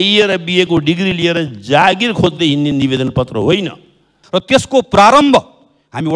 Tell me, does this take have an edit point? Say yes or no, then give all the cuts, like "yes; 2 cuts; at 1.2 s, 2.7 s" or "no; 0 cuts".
yes; 1 cut; at 4.2 s